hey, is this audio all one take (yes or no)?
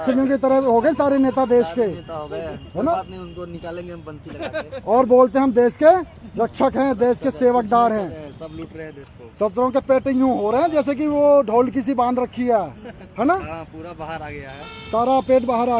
yes